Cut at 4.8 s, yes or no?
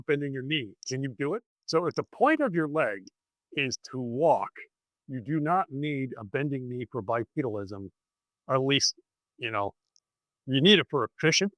no